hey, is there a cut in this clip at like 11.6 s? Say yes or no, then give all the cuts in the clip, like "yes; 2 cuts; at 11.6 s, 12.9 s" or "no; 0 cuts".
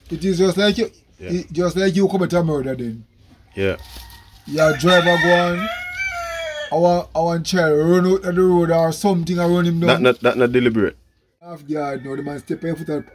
yes; 1 cut; at 11.6 s